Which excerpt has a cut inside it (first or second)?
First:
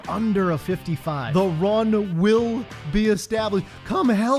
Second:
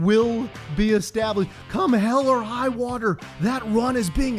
first